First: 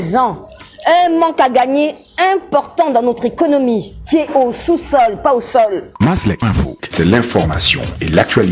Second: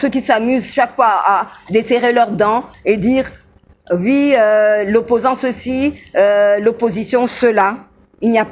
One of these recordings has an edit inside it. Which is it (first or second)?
first